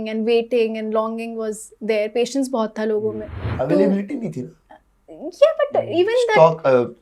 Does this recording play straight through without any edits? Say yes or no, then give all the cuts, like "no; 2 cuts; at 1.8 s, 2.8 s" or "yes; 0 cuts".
no; 1 cut; at 3.5 s